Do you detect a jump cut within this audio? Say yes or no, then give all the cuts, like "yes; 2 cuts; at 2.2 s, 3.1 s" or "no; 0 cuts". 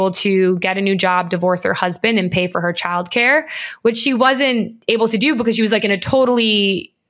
no; 0 cuts